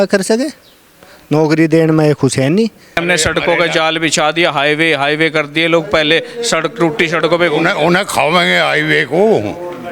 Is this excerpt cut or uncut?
cut